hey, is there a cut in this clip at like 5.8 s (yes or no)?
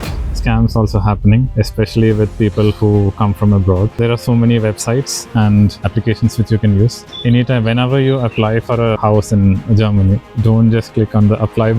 yes